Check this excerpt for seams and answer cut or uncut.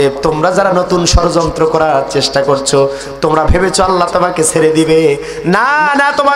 uncut